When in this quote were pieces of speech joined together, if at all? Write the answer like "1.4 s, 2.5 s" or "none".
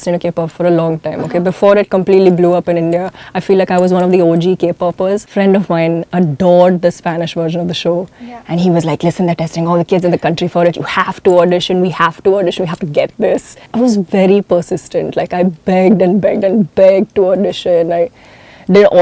5.3 s, 13.6 s